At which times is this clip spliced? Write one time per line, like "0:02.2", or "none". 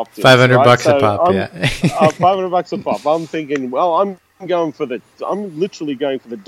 none